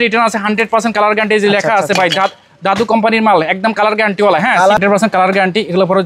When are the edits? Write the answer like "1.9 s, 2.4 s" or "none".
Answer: 4.8 s